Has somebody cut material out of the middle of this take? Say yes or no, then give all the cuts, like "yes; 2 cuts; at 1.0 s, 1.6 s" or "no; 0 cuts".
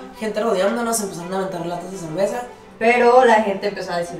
yes; 1 cut; at 2.6 s